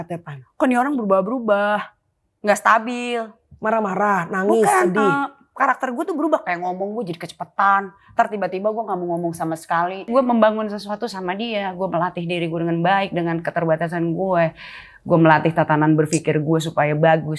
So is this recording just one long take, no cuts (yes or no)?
no